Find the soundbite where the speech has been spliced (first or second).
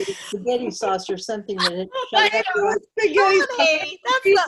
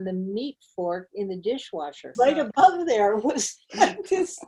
second